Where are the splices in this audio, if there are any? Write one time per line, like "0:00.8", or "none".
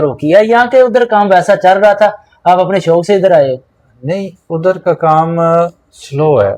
none